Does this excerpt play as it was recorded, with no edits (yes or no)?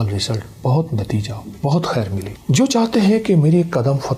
no